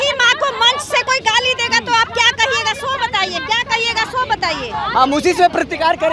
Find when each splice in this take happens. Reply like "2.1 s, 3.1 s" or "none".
none

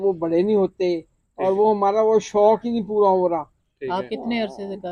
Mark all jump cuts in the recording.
none

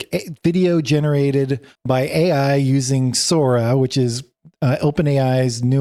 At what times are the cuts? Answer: none

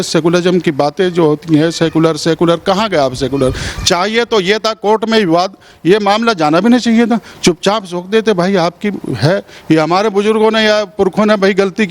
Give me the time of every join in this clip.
none

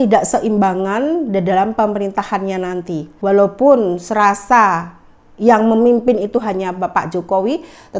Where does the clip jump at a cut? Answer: 3.1 s

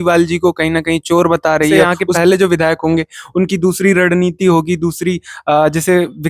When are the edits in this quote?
1.9 s

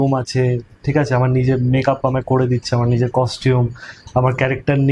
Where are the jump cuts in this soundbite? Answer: none

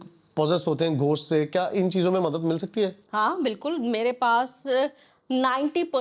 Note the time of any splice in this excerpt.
none

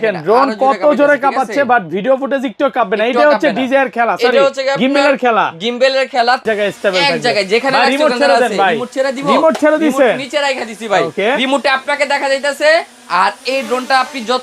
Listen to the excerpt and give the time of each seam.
6.4 s

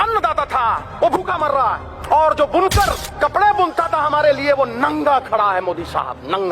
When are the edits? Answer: 0.9 s, 1.9 s, 3.0 s

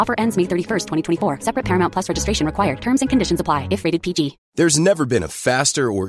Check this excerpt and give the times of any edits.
4.4 s

